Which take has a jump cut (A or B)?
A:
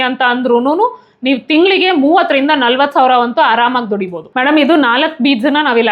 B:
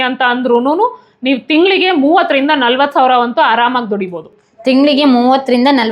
A